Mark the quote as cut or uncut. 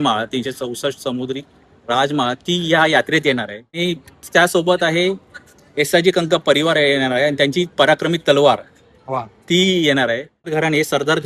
cut